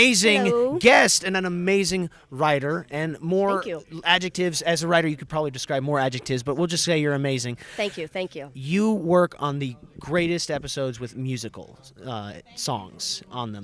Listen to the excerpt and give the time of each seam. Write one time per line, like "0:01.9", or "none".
0:10.5